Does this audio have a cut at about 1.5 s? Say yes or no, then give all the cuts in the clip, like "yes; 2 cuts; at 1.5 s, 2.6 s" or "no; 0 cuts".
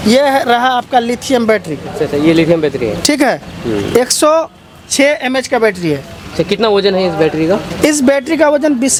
no; 0 cuts